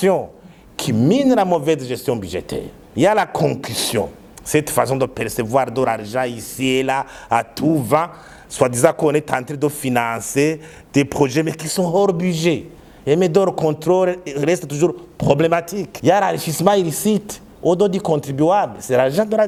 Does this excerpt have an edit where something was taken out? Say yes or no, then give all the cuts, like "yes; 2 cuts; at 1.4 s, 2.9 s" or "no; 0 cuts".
no; 0 cuts